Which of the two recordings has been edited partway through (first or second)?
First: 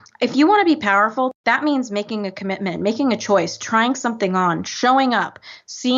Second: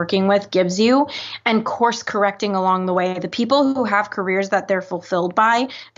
first